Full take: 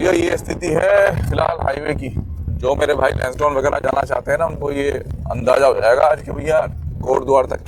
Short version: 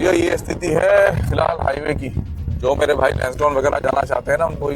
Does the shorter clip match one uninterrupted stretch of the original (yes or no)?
yes